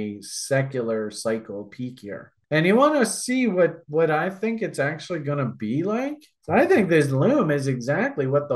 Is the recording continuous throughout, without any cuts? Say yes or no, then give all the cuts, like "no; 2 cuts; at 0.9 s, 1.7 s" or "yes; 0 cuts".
no; 2 cuts; at 2.3 s, 6.3 s